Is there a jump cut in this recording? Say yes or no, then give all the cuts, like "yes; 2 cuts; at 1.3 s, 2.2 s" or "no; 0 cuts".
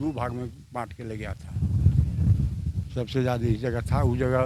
no; 0 cuts